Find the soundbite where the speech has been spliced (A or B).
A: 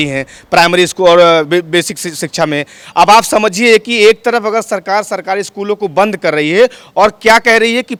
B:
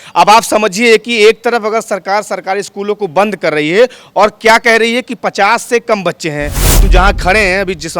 B